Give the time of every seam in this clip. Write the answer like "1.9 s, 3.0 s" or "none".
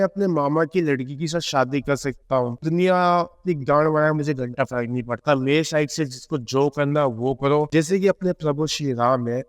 2.6 s, 7.7 s